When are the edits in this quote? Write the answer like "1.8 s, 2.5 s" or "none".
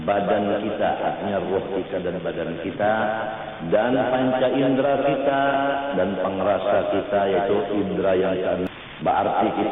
8.7 s